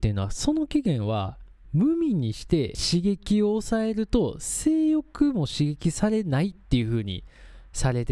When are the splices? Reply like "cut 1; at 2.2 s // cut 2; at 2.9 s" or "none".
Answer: cut 1; at 2.8 s

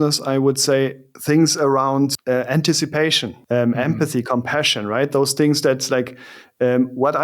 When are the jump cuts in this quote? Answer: cut 1; at 1.1 s // cut 2; at 2.2 s // cut 3; at 3.3 s

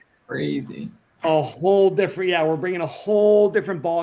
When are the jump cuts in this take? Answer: none

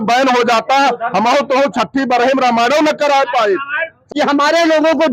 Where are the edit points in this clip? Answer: cut 1; at 4.1 s

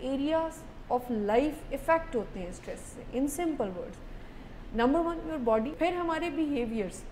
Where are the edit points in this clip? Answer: cut 1; at 5.7 s

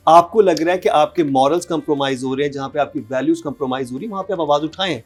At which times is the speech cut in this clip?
none

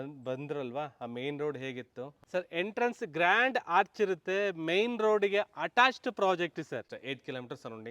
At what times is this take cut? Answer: cut 1; at 2.2 s // cut 2; at 6.8 s

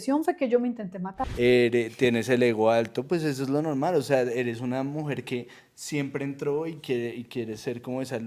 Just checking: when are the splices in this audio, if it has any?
cut 1; at 1.2 s

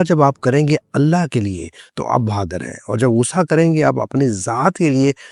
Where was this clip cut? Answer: none

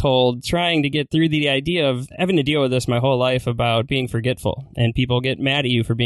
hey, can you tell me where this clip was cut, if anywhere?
cut 1; at 1.1 s // cut 2; at 2.1 s

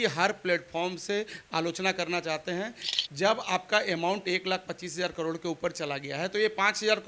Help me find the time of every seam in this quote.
cut 1; at 2.8 s

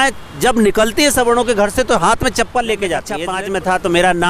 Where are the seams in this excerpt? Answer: cut 1; at 3.2 s

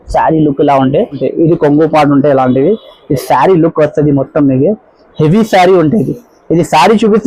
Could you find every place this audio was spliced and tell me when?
cut 1; at 1.2 s

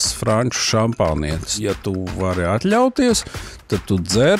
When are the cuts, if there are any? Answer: cut 1; at 1.5 s

